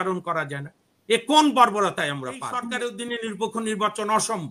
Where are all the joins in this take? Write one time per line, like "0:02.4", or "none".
0:02.7

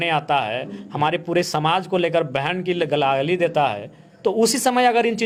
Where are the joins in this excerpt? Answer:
none

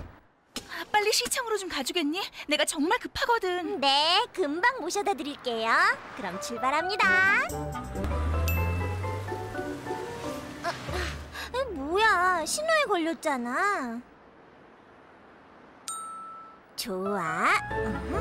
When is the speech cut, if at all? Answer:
0:03.7
0:08.0

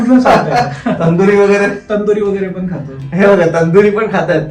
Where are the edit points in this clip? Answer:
none

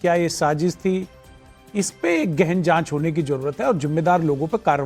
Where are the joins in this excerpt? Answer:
0:02.8

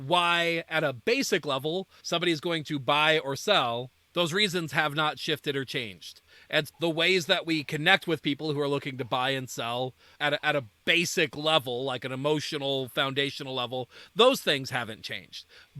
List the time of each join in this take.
0:02.0
0:04.0

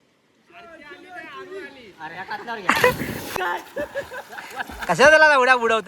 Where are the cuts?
0:03.4

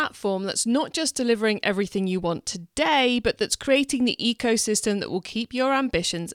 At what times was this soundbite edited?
none

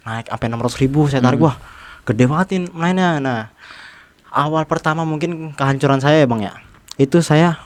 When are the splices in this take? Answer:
none

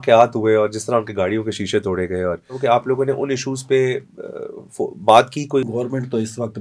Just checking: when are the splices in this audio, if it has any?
0:02.5
0:05.6

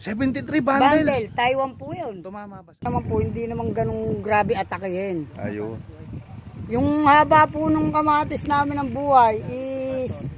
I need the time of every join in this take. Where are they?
0:02.8

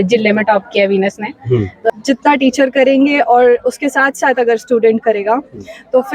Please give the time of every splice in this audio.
0:01.9

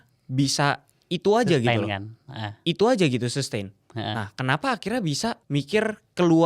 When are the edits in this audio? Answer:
0:05.4

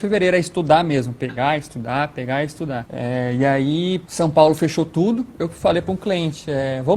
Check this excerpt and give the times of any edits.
0:02.9
0:04.1

